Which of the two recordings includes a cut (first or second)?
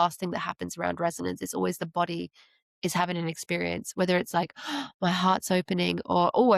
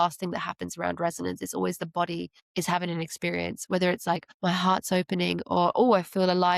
second